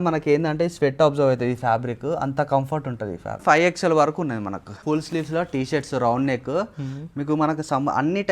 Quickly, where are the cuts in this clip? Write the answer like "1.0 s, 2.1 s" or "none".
3.4 s, 4.8 s